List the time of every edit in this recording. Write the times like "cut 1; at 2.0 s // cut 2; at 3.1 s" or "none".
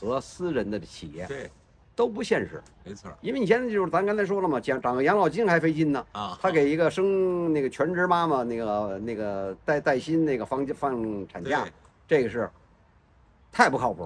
none